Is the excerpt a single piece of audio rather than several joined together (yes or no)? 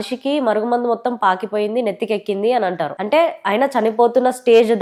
yes